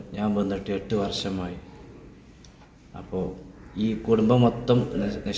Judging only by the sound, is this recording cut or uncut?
uncut